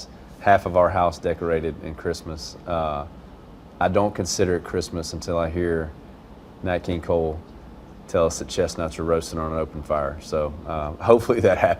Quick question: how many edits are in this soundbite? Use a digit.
0